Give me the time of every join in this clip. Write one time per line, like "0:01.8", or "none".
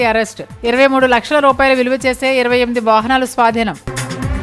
none